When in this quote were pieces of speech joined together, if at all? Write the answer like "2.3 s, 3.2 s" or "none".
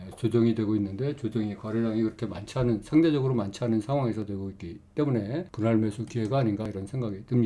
none